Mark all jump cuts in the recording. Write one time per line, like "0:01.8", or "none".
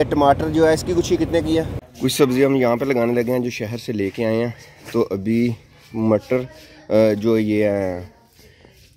0:01.8